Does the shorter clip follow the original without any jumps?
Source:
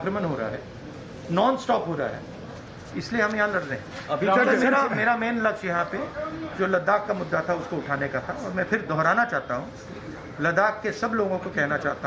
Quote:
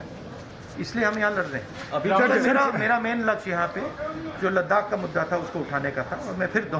yes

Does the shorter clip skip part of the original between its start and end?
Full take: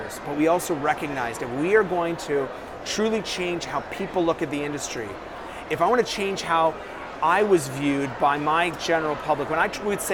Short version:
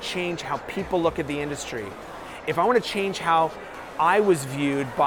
no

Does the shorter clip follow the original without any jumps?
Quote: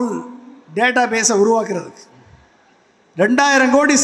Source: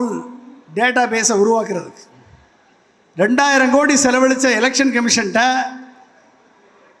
yes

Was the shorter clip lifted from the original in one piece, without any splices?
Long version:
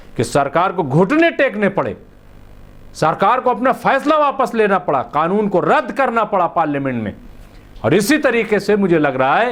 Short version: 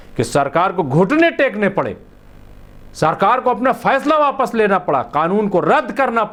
yes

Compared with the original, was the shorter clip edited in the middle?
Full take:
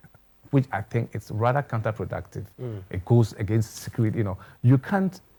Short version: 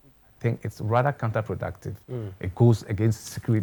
no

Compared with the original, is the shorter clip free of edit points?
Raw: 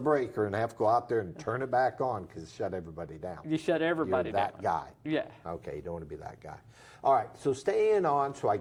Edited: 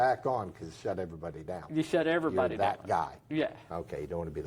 yes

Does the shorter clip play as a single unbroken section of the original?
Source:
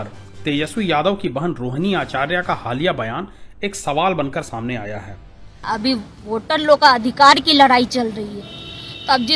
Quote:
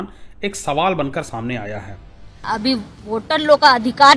yes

